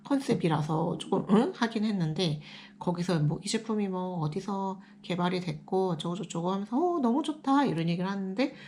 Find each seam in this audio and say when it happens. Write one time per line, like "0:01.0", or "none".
none